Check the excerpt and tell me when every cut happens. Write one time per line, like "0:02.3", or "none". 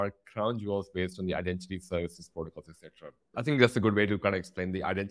none